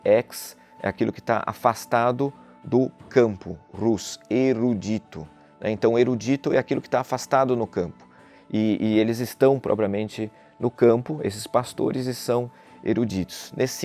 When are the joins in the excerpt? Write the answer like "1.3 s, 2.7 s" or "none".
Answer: none